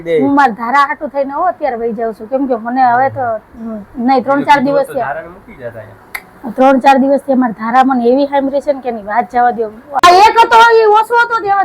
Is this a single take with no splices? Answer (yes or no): no